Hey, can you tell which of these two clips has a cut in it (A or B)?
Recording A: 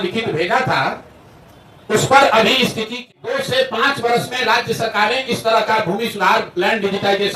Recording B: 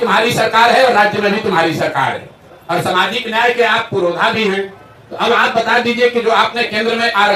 A